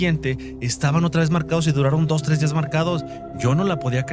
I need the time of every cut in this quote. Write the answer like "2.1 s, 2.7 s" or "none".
none